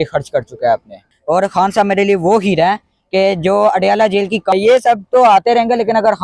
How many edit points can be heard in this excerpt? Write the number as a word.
two